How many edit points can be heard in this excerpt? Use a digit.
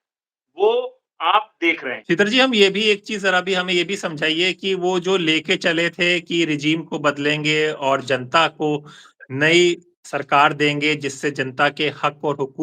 1